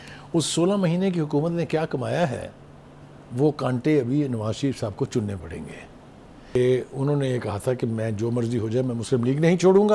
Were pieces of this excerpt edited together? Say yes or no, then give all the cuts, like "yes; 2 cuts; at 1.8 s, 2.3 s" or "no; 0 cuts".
yes; 1 cut; at 6.6 s